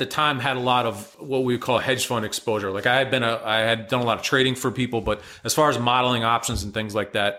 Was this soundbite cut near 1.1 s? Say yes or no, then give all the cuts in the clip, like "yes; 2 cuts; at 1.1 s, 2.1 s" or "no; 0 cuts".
yes; 1 cut; at 1.1 s